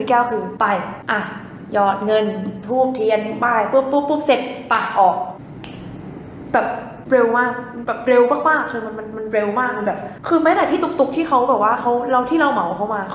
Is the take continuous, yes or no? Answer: yes